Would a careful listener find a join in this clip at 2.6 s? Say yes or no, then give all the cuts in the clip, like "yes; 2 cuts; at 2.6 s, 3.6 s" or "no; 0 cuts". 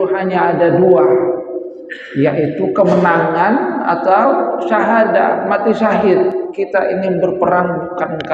no; 1 cut; at 6.5 s